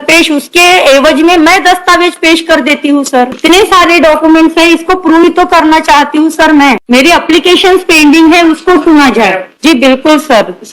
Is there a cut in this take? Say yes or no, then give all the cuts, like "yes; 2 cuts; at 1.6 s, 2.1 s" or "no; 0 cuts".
yes; 3 cuts; at 3.4 s, 6.8 s, 9.5 s